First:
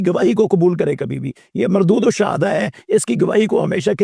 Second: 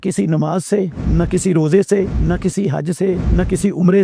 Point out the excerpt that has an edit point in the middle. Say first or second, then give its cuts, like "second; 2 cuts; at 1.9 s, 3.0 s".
second; 3 cuts; at 1.0 s, 2.2 s, 3.2 s